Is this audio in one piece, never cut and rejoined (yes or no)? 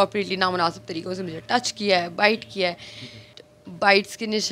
no